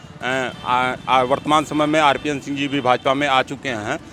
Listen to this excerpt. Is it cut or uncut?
uncut